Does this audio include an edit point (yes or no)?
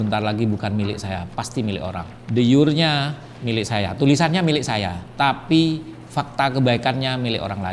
no